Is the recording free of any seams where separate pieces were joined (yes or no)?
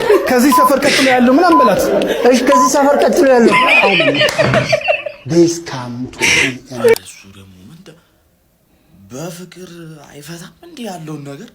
no